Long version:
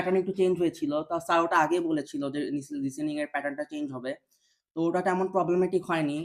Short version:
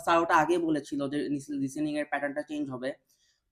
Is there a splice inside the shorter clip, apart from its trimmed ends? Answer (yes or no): no